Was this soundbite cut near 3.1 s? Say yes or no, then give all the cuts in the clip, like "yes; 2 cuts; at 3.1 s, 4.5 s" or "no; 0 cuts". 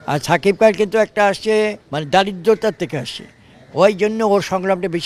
no; 1 cut; at 1.9 s